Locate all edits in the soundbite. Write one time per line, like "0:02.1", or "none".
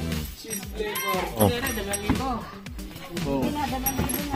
0:01.4